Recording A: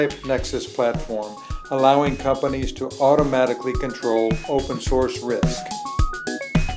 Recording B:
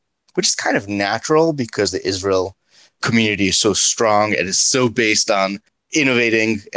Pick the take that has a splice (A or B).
A